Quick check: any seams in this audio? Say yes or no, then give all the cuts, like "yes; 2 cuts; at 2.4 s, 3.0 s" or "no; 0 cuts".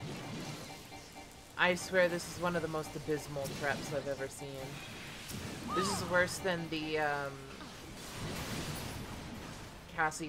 no; 0 cuts